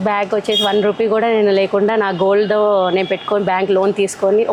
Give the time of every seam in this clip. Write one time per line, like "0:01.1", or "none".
none